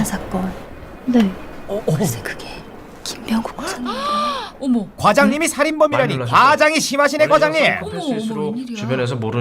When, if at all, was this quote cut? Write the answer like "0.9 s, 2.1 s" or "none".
5.4 s